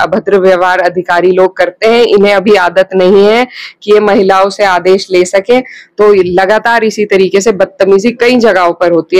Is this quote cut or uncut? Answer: uncut